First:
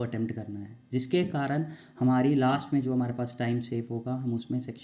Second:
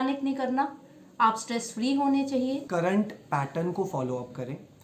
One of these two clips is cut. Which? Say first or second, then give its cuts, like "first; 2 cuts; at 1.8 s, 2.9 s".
second; 1 cut; at 2.6 s